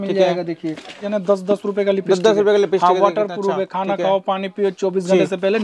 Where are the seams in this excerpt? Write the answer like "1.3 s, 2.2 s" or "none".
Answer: 1.1 s